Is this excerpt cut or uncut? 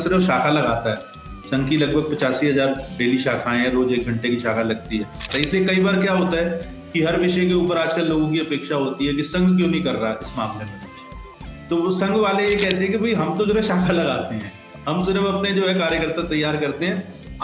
cut